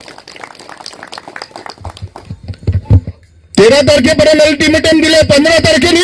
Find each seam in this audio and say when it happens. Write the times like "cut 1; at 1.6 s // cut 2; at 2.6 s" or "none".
cut 1; at 3.1 s